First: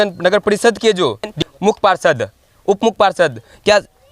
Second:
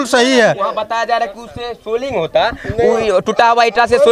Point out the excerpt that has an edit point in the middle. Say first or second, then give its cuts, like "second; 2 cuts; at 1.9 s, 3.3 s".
first; 1 cut; at 1.4 s